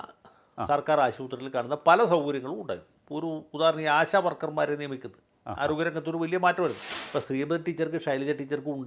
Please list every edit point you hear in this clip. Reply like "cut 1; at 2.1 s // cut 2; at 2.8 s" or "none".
cut 1; at 6.9 s